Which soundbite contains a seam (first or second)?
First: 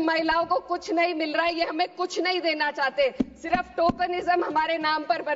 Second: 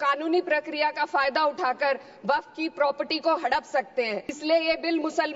second